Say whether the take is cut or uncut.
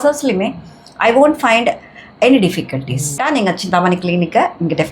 cut